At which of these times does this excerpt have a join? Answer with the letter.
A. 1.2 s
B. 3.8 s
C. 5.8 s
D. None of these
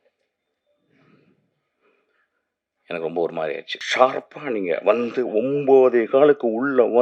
B